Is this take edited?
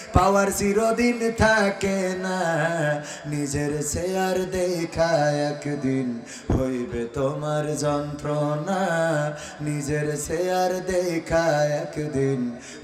no; 0 cuts

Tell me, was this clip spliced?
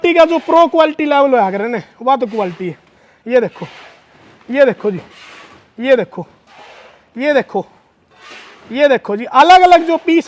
no; 0 cuts

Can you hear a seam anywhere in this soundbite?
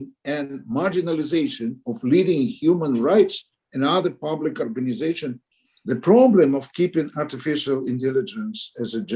yes; 1 cut; at 5.5 s

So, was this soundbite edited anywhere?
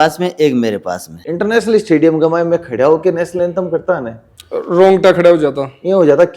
yes; 1 cut; at 1.2 s

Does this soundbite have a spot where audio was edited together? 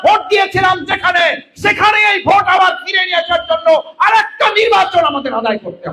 no; 0 cuts

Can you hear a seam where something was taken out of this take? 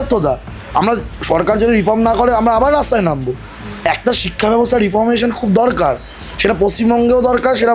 no; 0 cuts

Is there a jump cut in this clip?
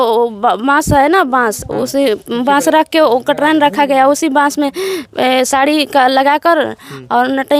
no; 0 cuts

